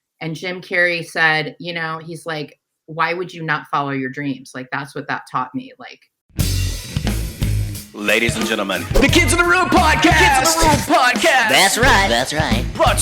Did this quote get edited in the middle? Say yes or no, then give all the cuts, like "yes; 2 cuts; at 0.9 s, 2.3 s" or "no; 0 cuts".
yes; 1 cut; at 6.2 s